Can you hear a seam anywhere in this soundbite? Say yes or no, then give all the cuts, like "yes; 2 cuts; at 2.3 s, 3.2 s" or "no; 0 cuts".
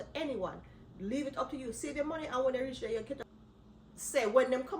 yes; 1 cut; at 3.2 s